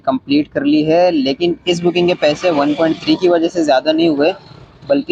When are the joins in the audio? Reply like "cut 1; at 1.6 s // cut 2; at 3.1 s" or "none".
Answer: none